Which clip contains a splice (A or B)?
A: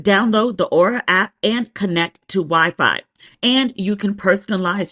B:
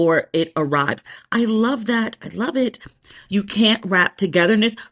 A